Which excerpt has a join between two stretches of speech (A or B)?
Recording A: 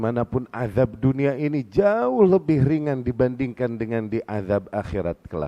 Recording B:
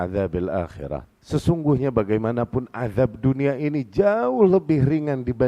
B